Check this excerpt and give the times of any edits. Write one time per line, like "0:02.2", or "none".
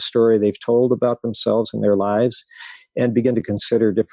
none